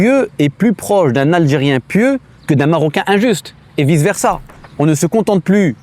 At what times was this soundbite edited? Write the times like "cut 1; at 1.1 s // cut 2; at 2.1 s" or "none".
cut 1; at 4.4 s